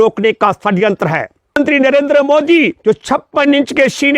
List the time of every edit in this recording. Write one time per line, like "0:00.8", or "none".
0:01.6